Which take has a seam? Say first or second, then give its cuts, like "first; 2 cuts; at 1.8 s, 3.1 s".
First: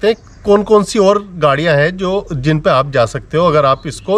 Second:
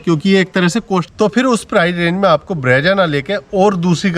second; 1 cut; at 1.1 s